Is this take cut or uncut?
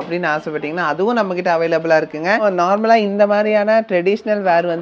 cut